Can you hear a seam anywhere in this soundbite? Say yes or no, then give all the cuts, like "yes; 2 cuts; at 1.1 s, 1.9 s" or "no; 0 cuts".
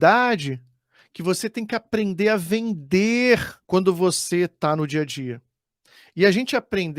yes; 1 cut; at 3.5 s